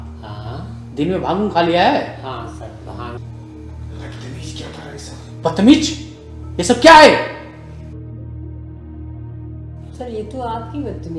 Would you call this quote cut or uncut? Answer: cut